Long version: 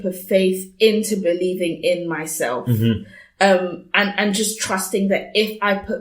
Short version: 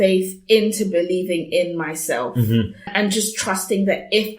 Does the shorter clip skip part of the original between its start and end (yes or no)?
yes